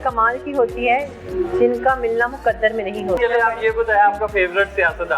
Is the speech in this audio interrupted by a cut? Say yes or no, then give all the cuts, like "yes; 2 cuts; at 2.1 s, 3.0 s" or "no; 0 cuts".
yes; 1 cut; at 3.2 s